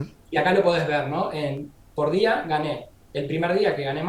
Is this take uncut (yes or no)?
yes